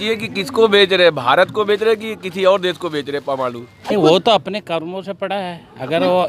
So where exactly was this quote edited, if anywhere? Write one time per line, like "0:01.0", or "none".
0:03.8